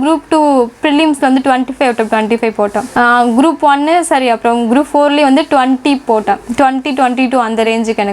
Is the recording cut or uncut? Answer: uncut